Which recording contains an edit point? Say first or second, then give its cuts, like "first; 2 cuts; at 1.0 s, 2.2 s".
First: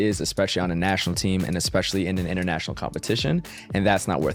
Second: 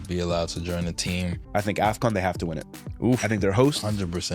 second; 1 cut; at 1.4 s